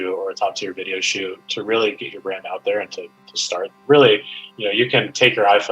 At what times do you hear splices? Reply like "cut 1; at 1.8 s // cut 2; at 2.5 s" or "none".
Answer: cut 1; at 3.8 s